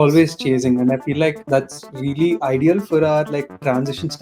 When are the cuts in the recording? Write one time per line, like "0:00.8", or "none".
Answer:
0:01.4